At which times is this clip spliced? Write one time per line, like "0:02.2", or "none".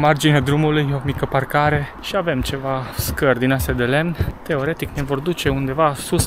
0:02.0
0:04.3